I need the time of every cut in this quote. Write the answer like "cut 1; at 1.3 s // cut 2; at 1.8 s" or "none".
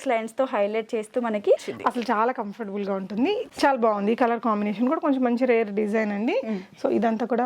cut 1; at 1.7 s // cut 2; at 3.5 s